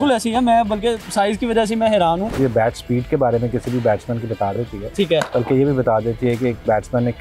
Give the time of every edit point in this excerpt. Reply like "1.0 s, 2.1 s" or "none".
2.4 s